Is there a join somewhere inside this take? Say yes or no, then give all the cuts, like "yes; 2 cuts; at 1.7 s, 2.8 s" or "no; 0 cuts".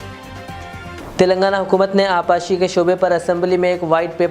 yes; 1 cut; at 1.0 s